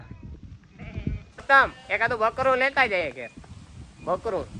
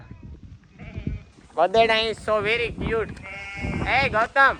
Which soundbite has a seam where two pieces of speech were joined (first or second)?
first